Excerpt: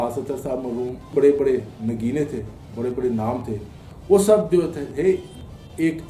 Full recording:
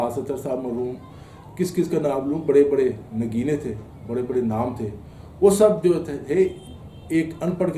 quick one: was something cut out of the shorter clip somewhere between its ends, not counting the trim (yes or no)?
yes